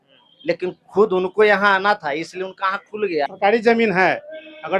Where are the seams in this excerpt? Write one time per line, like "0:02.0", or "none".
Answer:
0:03.3